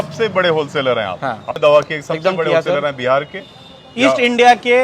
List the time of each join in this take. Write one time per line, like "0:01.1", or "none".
0:01.5